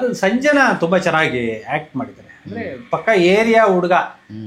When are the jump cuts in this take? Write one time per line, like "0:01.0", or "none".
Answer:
none